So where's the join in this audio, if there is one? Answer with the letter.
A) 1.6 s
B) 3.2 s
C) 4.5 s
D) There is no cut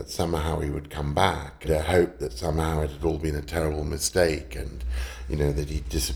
A